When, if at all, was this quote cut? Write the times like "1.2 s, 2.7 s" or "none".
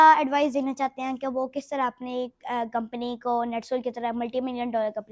none